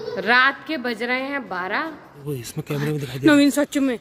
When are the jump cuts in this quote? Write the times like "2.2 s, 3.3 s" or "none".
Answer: 2.2 s